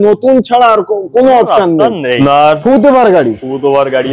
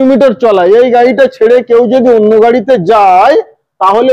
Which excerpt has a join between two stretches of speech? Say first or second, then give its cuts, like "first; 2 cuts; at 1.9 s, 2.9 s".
first; 1 cut; at 2.2 s